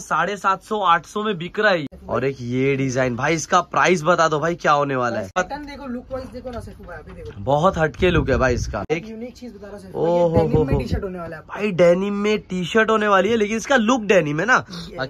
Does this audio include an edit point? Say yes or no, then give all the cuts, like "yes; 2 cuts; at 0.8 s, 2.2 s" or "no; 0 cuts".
yes; 3 cuts; at 1.9 s, 5.4 s, 8.9 s